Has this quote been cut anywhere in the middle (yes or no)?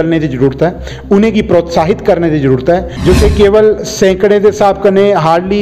yes